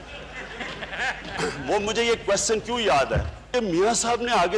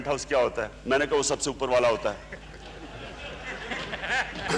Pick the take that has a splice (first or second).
first